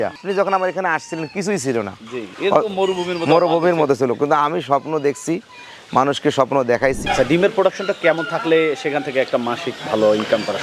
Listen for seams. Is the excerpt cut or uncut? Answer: cut